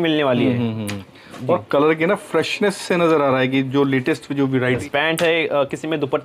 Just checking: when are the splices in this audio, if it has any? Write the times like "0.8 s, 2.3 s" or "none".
4.8 s